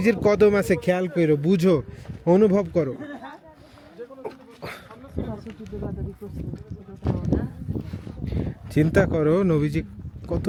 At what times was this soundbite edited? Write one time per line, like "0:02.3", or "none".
none